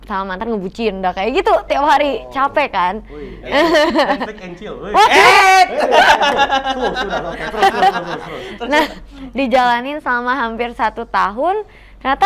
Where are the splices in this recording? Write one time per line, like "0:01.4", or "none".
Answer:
none